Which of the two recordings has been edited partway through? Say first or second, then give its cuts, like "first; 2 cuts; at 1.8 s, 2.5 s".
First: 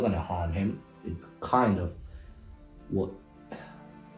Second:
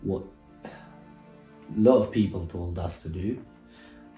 first; 1 cut; at 0.9 s